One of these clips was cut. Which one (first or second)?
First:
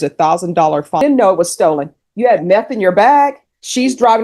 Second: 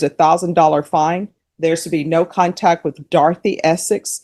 first